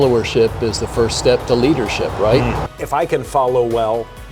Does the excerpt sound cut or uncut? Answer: cut